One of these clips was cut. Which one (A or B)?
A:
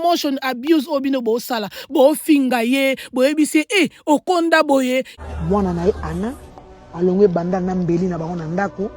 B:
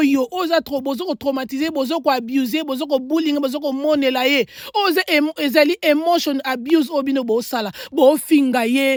A